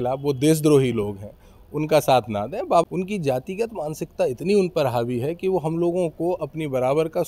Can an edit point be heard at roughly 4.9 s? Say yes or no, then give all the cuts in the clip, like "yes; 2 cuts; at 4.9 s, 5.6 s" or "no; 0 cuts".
no; 1 cut; at 2.8 s